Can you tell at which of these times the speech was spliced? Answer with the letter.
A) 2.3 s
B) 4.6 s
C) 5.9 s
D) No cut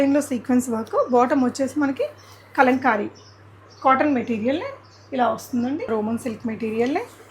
C